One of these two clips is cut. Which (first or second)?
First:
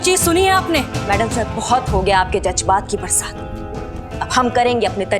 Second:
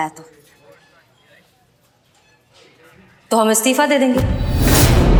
first